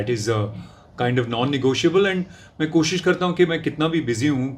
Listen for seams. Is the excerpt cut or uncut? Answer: uncut